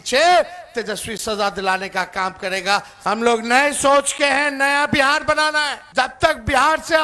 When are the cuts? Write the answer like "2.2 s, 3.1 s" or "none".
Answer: 2.9 s, 5.8 s